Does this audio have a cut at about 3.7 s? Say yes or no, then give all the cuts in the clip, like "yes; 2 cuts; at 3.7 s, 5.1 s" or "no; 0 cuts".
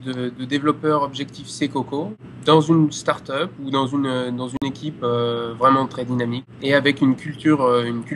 no; 2 cuts; at 2.2 s, 6.5 s